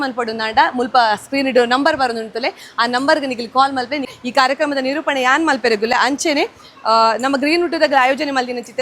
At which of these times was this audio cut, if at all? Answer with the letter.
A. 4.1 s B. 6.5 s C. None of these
A